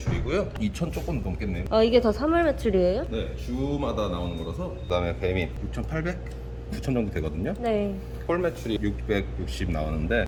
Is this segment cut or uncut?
uncut